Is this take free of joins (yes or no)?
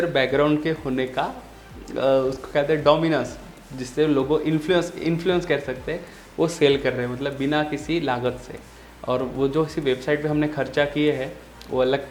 yes